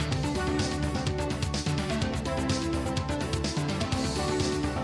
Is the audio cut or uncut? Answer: uncut